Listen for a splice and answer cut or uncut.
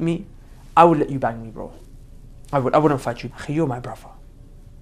cut